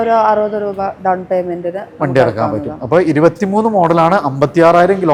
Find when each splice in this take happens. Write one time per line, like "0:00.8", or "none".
none